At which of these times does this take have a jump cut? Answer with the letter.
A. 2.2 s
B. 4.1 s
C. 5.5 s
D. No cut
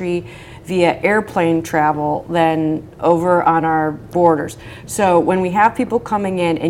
B